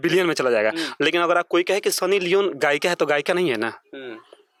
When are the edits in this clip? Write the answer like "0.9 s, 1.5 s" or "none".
none

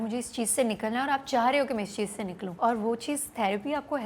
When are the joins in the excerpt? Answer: 2.5 s

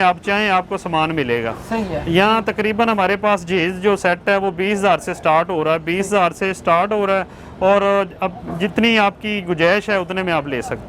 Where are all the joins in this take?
none

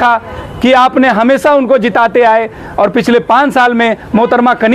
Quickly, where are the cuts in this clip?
none

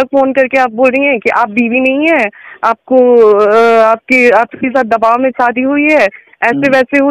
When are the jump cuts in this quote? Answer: none

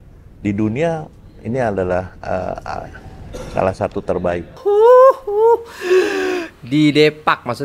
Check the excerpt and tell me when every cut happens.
4.6 s

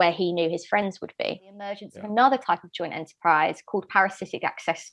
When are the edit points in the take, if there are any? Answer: 1.9 s

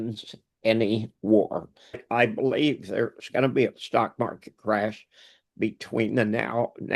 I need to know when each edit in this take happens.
2.0 s

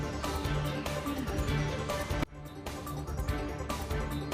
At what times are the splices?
none

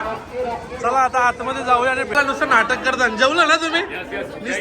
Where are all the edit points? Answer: 2.2 s

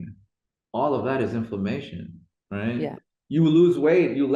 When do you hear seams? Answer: 3.1 s

